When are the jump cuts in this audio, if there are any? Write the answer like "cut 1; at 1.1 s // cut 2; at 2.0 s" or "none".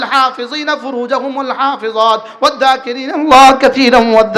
none